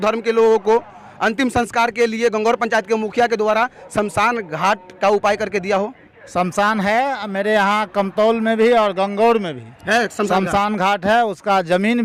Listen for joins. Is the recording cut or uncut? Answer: uncut